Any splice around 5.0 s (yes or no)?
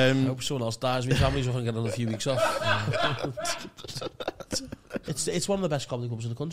yes